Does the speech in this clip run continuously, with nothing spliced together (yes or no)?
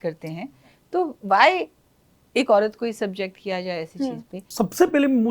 no